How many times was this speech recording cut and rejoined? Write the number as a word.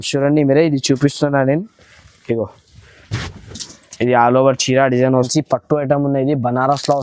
one